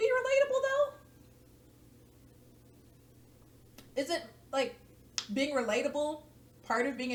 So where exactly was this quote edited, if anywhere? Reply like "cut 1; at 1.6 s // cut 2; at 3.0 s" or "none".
none

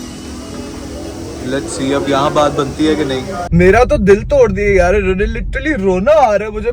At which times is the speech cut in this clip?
cut 1; at 3.4 s

